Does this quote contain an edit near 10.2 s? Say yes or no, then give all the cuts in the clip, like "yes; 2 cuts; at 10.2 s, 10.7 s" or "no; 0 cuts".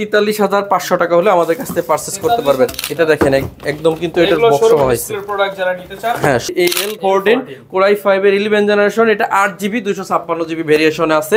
no; 2 cuts; at 2.7 s, 6.5 s